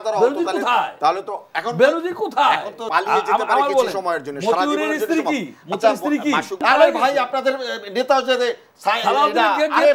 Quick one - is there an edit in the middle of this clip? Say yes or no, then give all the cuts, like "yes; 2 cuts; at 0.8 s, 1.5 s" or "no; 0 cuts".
yes; 2 cuts; at 2.8 s, 6.6 s